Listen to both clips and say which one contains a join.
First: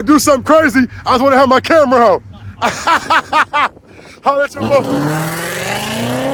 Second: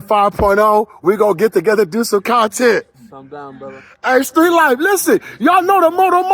second; 1 cut; at 3.8 s

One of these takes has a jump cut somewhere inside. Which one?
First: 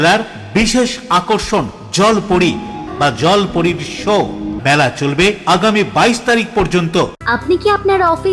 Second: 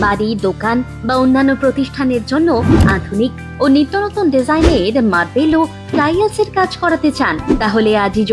first; 3 cuts; at 2.9 s, 4.5 s, 7.2 s

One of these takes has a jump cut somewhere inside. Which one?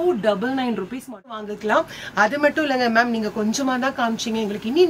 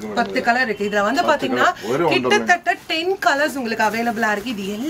first; 1 cut; at 1.4 s

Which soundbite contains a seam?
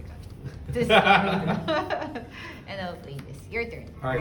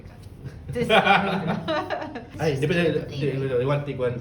second; 1 cut; at 2.2 s

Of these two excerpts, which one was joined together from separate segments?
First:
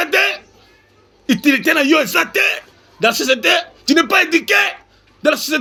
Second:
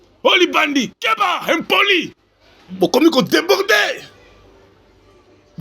second; 1 cut; at 2.6 s

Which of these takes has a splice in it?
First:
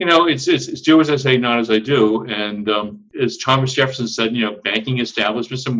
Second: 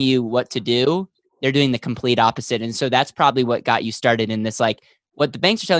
first; 1 cut; at 3.0 s

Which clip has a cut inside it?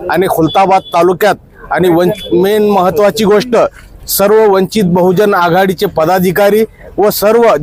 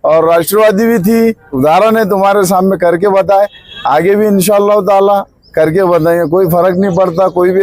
second; 1 cut; at 1.5 s

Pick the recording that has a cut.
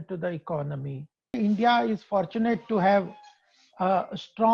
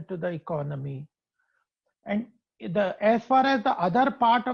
first; 1 cut; at 1.4 s

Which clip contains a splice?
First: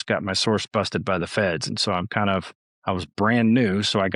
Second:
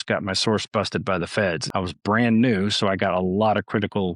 second; 1 cut; at 1.6 s

